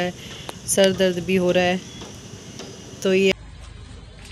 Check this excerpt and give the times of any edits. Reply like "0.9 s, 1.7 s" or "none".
3.3 s